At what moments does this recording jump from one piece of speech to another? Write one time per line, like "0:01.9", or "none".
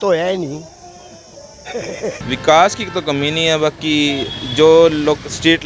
0:02.2

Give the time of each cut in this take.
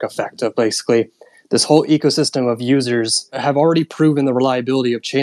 0:03.4

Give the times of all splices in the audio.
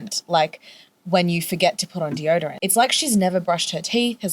0:02.6

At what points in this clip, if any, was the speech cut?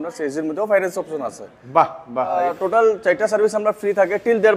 0:02.5

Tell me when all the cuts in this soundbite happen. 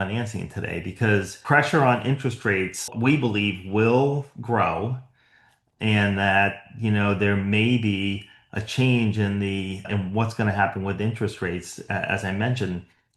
0:01.3
0:02.9
0:09.9

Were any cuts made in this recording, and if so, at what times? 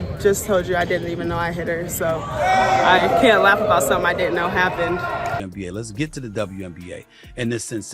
0:05.4

